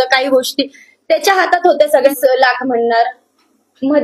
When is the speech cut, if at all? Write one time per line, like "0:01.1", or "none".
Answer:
0:02.2